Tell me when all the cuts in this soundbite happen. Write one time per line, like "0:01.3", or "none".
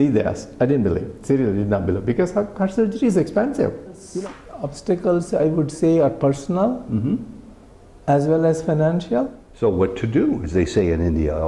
0:04.1
0:09.4